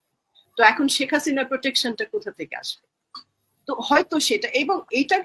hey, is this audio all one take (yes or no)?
yes